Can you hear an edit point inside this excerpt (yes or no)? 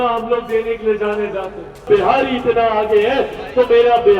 yes